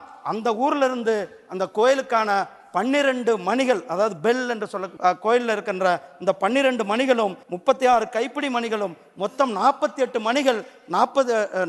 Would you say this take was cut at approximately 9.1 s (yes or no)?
no